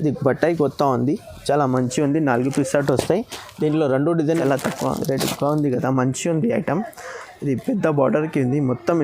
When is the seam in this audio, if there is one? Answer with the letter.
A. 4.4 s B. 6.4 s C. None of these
A